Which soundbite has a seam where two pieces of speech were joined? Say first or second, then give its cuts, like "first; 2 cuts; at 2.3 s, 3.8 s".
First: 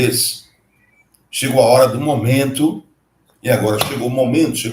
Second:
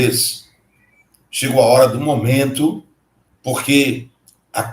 first; 1 cut; at 3.3 s